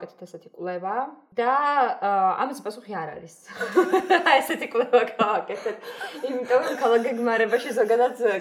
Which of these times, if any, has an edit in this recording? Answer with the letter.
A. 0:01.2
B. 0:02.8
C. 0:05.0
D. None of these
A